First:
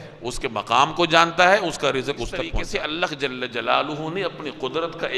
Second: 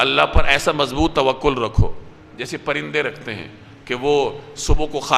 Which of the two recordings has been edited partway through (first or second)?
first